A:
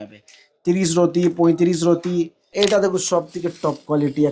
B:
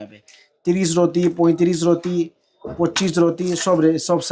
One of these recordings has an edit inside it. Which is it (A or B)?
A